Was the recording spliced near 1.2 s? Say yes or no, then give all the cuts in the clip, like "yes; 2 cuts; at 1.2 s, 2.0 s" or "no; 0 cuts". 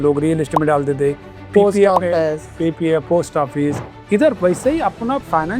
no; 1 cut; at 3.9 s